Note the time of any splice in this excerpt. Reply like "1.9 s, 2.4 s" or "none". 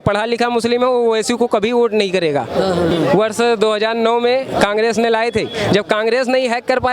2.9 s